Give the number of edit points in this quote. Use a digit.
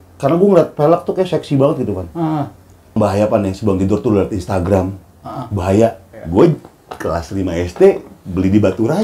2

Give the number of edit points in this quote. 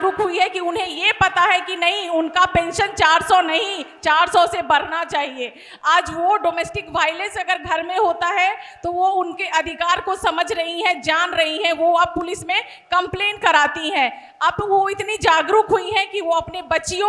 0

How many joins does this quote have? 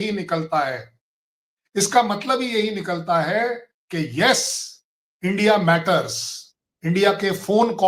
0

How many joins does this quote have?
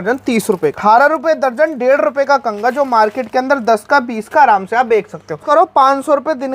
2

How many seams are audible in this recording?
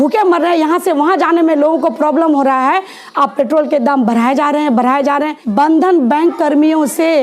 1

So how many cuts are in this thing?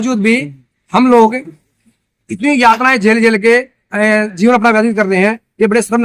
0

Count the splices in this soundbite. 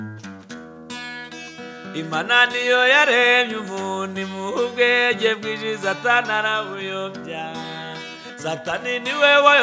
1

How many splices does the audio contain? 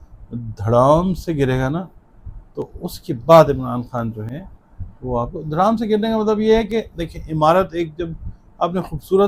0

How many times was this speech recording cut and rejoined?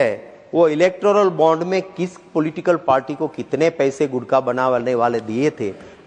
0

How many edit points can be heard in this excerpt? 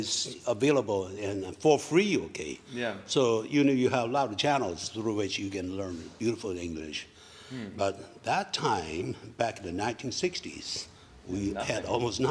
0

